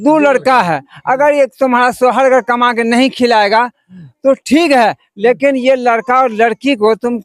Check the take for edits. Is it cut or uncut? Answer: uncut